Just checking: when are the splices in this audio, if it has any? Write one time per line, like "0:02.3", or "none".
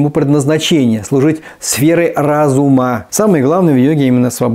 0:03.0